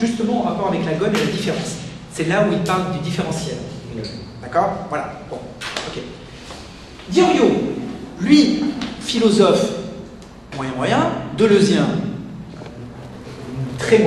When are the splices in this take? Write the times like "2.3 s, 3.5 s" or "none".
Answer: none